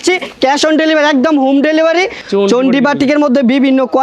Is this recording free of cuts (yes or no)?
no